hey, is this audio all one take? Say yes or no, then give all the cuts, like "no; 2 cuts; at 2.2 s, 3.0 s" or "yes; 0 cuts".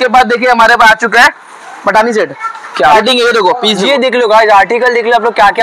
no; 1 cut; at 2.9 s